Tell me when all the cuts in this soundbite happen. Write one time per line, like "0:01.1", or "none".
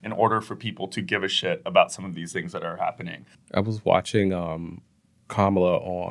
none